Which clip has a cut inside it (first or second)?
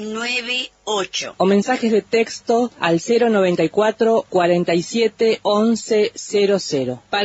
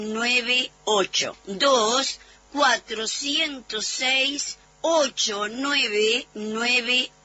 first